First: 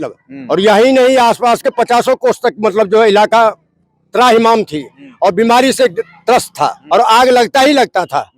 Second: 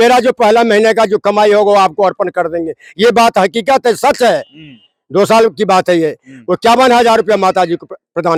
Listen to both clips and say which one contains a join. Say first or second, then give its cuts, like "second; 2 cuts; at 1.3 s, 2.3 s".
first; 1 cut; at 6.8 s